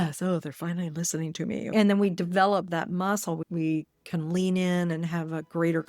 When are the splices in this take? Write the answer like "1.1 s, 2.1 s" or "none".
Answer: 1.7 s